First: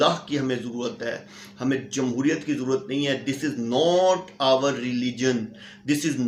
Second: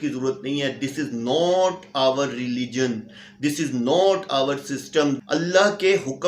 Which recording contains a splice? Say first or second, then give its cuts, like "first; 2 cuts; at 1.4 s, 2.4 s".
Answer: second; 1 cut; at 5.2 s